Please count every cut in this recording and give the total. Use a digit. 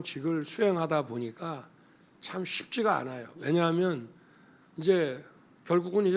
0